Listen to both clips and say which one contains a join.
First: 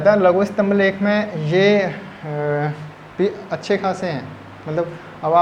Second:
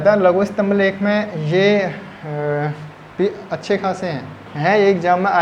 second; 1 cut; at 4.4 s

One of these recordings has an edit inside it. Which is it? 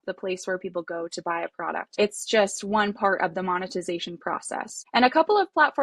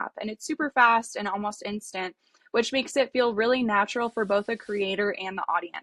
first; 2 cuts; at 1.9 s, 4.8 s

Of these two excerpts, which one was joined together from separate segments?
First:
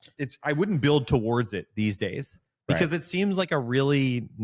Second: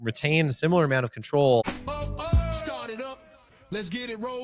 second; 1 cut; at 1.6 s

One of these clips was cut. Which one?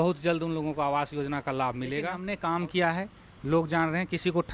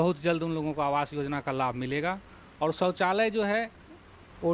first; 1 cut; at 2.2 s

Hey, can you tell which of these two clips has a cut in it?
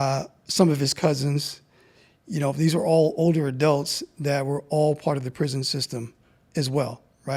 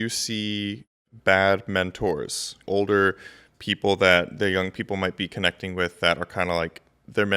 second; 2 cuts; at 1.1 s, 2.5 s

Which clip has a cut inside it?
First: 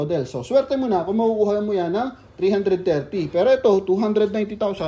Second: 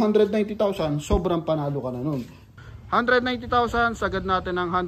second; 1 cut; at 2.5 s

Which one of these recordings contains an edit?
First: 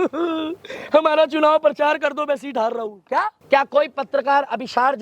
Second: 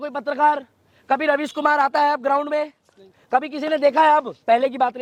first; 1 cut; at 3.4 s

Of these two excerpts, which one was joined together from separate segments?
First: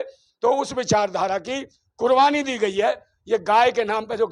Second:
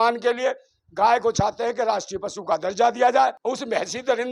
second; 1 cut; at 3.4 s

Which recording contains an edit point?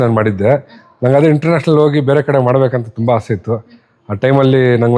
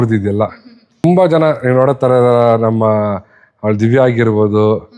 second; 1 cut; at 1.0 s

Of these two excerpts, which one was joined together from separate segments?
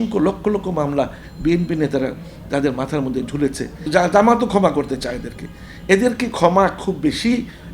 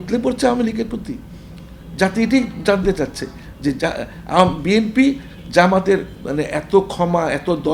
first; 1 cut; at 3.7 s

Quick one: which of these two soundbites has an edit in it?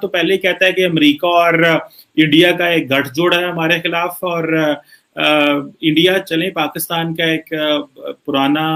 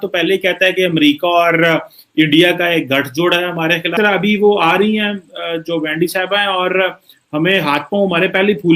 second; 1 cut; at 3.9 s

